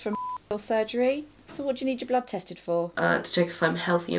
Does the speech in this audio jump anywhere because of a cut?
yes; 2 cuts; at 1.5 s, 2.9 s

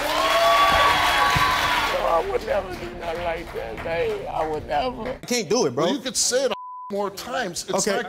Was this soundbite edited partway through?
yes; 1 cut; at 5.1 s

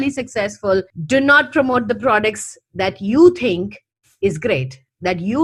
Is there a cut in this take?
no; 0 cuts

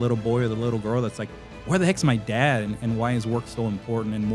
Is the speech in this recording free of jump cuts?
yes; 0 cuts

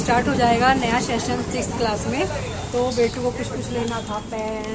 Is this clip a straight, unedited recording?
yes; 0 cuts

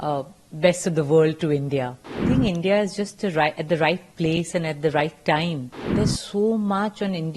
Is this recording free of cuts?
no; 2 cuts; at 2.2 s, 5.8 s

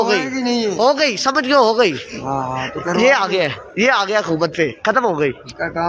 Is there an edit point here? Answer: no; 0 cuts

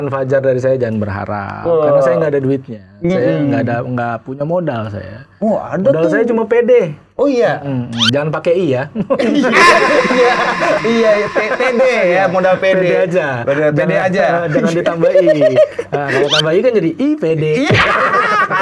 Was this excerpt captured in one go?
yes; 0 cuts

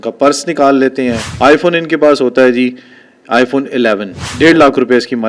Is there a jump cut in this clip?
yes; 2 cuts; at 1.2 s, 4.3 s

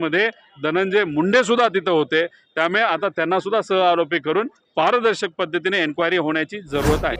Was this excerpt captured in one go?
yes; 0 cuts

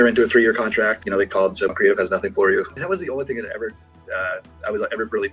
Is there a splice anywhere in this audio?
yes; 2 cuts; at 1.7 s, 2.8 s

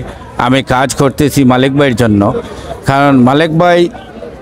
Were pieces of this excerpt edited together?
no; 0 cuts

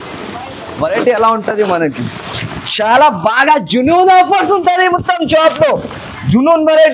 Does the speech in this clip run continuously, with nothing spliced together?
yes; 0 cuts

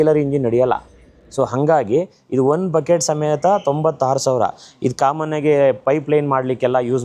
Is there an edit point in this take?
no; 0 cuts

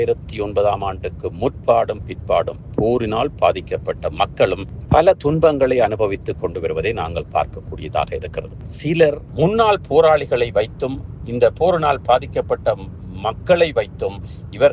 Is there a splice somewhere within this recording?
yes; 1 cut; at 9.2 s

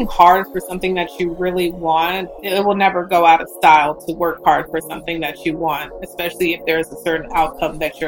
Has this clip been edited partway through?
yes; 1 cut; at 2.3 s

